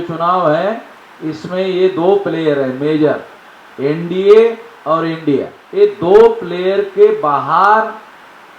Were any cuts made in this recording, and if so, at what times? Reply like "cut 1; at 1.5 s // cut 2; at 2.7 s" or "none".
cut 1; at 5.6 s